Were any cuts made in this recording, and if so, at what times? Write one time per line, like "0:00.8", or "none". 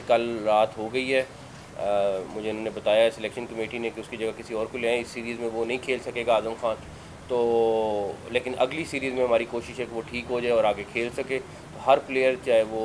none